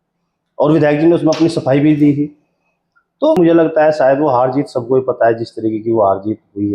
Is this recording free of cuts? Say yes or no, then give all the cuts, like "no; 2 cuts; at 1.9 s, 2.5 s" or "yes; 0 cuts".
no; 1 cut; at 3.4 s